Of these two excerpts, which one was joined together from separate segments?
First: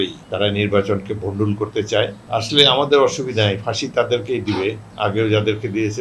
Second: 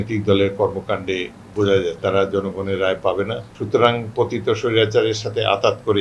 second; 1 cut; at 2.0 s

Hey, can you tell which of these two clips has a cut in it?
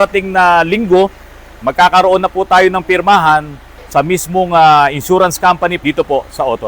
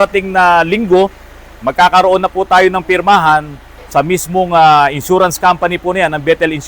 first; 1 cut; at 5.8 s

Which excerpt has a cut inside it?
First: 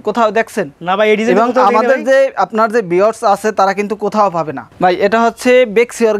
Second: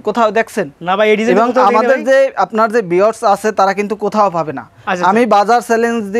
first; 1 cut; at 4.7 s

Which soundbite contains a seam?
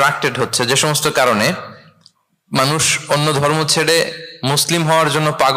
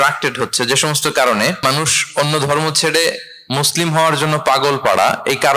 second; 1 cut; at 1.6 s

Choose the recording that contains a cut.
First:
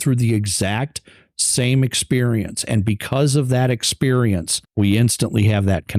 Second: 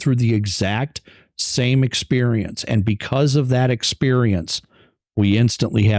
first; 1 cut; at 4.6 s

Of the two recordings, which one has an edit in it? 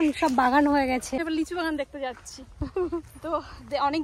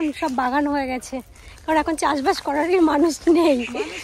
first; 1 cut; at 1.2 s

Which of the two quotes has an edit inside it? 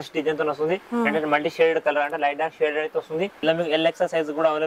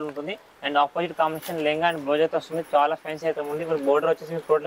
first; 1 cut; at 3.4 s

